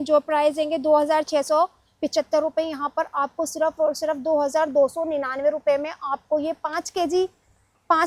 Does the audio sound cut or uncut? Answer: uncut